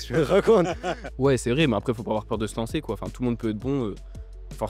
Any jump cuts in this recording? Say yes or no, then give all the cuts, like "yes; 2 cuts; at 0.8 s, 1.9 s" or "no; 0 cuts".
yes; 1 cut; at 1.0 s